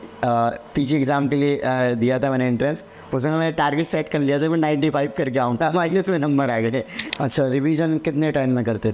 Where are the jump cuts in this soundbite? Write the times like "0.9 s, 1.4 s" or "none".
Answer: 6.9 s

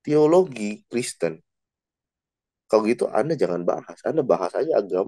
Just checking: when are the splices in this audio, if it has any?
none

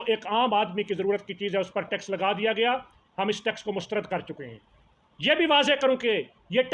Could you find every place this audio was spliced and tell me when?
none

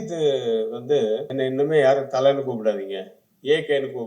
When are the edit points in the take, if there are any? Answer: 1.3 s

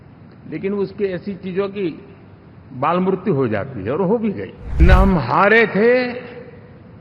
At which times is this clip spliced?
4.8 s

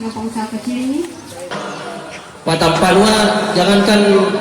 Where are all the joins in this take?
1.5 s

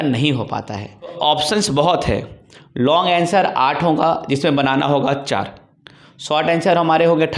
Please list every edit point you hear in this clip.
1.1 s

